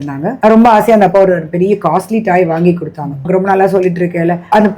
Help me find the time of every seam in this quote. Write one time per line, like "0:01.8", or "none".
none